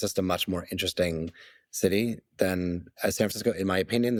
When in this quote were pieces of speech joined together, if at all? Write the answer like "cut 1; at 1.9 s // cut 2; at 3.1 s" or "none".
none